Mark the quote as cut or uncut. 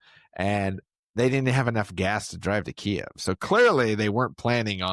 uncut